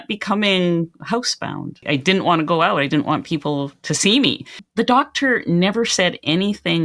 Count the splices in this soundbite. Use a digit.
2